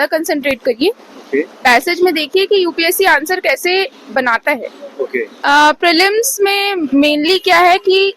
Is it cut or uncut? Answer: cut